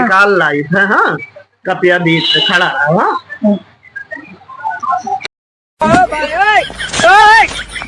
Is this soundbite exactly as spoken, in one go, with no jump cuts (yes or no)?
yes